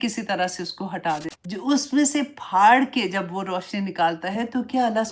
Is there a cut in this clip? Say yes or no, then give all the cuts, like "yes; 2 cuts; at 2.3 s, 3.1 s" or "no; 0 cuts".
yes; 1 cut; at 1.3 s